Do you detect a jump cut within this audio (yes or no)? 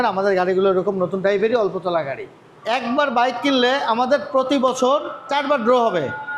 yes